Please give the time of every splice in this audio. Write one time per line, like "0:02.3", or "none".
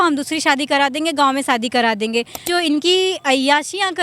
0:02.4